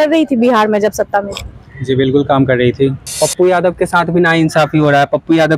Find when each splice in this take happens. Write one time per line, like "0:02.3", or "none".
0:03.1